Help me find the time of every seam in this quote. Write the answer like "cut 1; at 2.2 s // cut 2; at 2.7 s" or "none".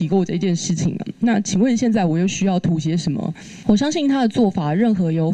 cut 1; at 3.5 s